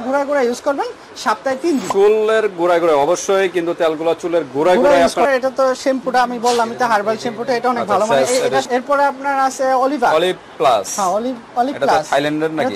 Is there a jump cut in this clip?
yes; 2 cuts; at 5.3 s, 8.6 s

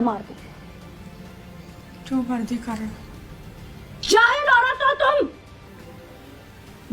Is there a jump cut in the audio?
yes; 1 cut; at 5.7 s

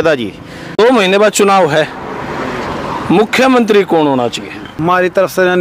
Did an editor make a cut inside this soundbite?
yes; 2 cuts; at 1.0 s, 4.8 s

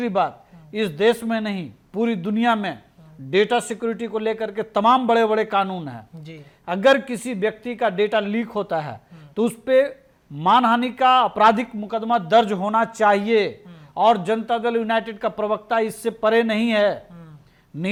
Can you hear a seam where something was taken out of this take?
no; 0 cuts

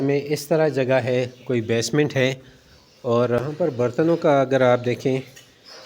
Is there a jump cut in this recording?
yes; 1 cut; at 3.4 s

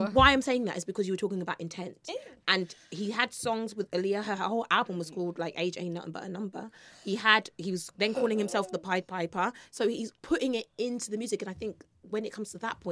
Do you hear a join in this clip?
yes; 1 cut; at 10.1 s

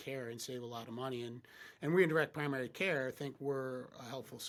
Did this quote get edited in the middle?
no; 0 cuts

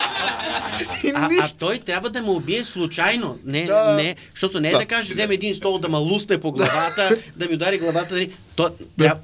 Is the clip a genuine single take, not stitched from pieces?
yes; 0 cuts

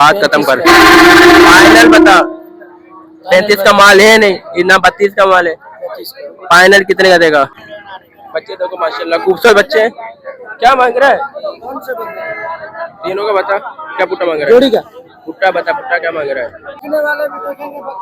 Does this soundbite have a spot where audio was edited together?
yes; 2 cuts; at 7.6 s, 16.8 s

